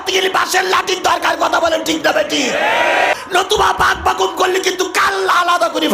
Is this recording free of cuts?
no; 1 cut; at 3.1 s

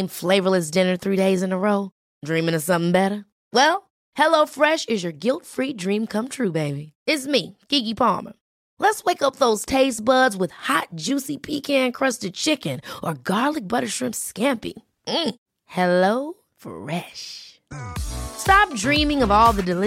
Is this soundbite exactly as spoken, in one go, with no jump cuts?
yes; 0 cuts

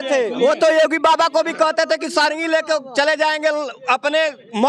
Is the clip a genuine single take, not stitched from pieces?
yes; 0 cuts

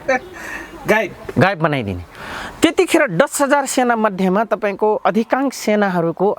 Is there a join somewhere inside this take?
no; 0 cuts

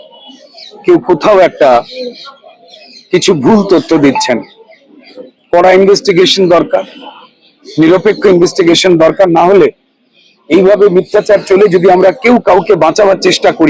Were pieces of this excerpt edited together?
no; 0 cuts

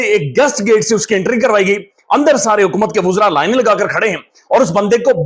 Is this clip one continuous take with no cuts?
yes; 0 cuts

